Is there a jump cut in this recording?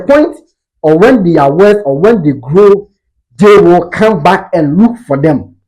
no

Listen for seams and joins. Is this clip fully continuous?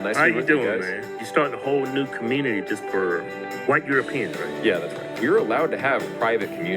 no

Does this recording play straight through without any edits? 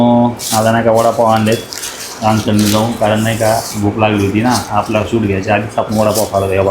yes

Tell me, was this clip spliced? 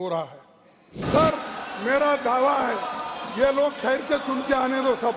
yes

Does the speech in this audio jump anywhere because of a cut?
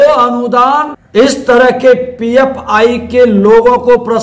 yes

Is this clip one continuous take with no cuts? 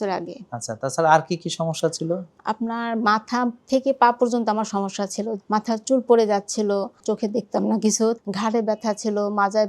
no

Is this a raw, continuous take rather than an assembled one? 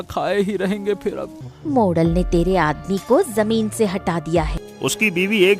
no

